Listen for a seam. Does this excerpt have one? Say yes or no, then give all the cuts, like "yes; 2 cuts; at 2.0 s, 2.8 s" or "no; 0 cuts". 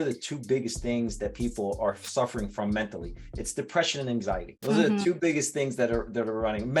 yes; 1 cut; at 4.5 s